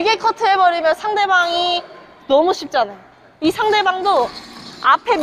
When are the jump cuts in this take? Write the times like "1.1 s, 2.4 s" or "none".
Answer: none